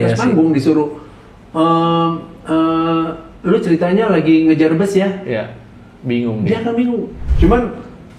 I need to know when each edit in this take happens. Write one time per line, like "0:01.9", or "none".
0:07.2